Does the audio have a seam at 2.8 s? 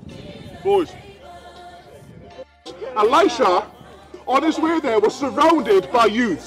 yes; 1 cut; at 2.8 s

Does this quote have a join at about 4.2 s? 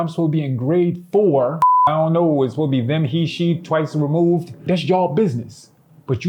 no; 1 cut; at 1.9 s

